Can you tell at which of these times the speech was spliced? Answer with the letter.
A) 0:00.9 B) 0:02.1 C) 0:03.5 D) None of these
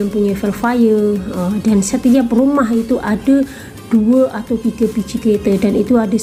D